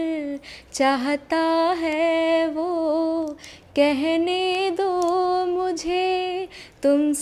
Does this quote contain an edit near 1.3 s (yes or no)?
no